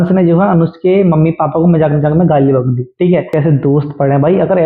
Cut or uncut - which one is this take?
cut